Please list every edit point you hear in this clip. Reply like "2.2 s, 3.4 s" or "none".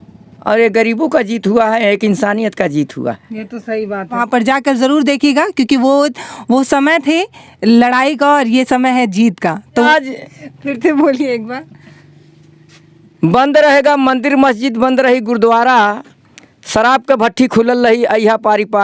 4.2 s, 9.7 s